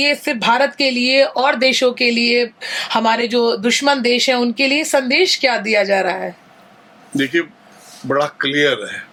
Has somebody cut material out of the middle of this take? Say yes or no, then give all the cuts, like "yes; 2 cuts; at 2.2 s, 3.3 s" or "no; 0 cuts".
no; 0 cuts